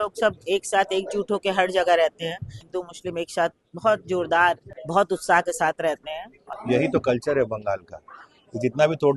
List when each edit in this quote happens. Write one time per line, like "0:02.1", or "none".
0:02.7
0:04.7
0:06.3